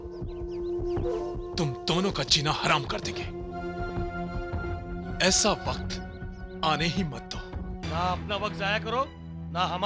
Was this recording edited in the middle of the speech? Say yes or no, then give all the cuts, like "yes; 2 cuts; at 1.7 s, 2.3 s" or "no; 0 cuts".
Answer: yes; 1 cut; at 7.8 s